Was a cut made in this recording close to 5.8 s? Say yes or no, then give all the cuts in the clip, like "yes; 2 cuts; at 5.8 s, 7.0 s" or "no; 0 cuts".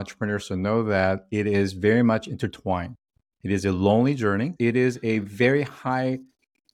no; 1 cut; at 4.5 s